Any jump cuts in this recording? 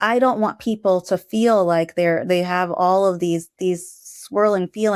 no; 0 cuts

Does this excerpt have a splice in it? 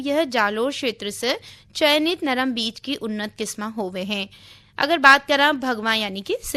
no; 0 cuts

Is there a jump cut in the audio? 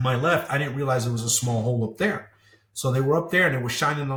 no; 0 cuts

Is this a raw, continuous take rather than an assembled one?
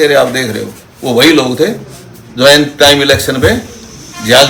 yes; 0 cuts

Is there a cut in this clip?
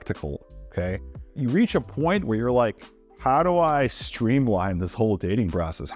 yes; 1 cut; at 1.3 s

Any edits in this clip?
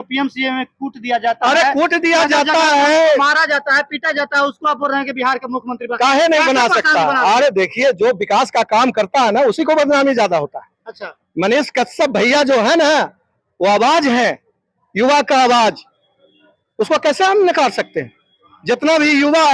no; 0 cuts

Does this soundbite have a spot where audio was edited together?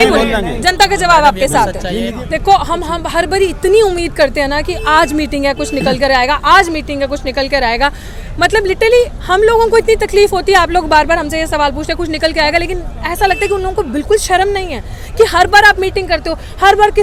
no; 0 cuts

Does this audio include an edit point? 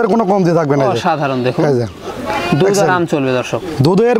no; 0 cuts

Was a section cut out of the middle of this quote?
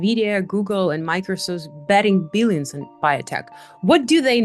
no; 0 cuts

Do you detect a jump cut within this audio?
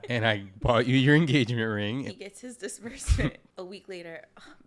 yes; 2 cuts; at 2.1 s, 3.4 s

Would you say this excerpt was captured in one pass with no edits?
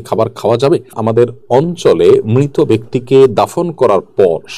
no; 1 cut; at 0.9 s

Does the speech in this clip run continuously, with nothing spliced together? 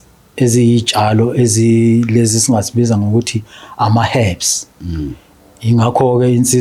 yes; 0 cuts

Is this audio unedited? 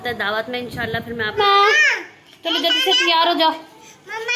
no; 1 cut; at 1.4 s

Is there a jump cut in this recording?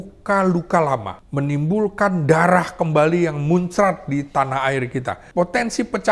yes; 2 cuts; at 1.2 s, 5.2 s

